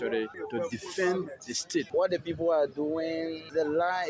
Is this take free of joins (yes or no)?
yes